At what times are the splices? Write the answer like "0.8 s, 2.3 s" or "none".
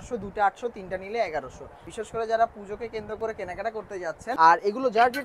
1.8 s, 4.3 s